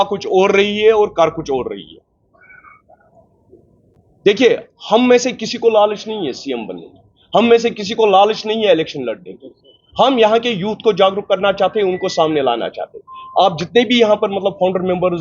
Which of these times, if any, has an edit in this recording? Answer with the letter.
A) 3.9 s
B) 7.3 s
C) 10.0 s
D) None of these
A